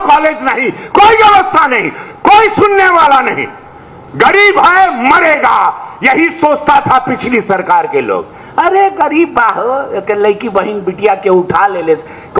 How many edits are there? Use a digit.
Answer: 0